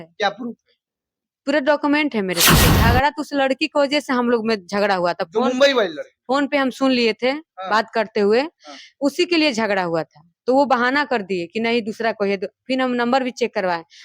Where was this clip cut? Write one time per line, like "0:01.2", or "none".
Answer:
0:02.7